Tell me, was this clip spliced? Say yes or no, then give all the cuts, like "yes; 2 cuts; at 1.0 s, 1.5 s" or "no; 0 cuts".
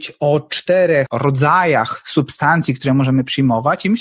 yes; 1 cut; at 1.1 s